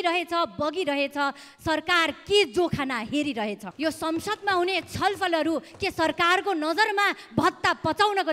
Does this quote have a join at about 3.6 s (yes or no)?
yes